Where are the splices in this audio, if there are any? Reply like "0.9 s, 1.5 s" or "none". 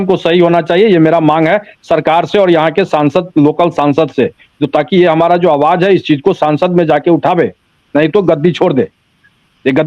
none